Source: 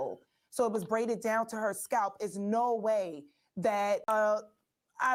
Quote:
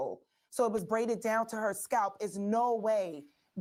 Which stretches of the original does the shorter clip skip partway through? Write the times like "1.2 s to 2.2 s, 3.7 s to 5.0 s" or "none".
none